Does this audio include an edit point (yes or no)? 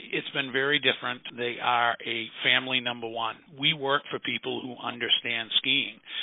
yes